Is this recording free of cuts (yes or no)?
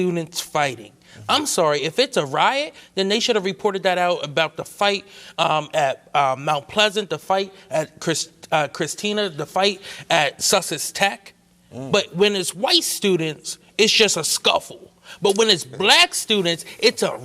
yes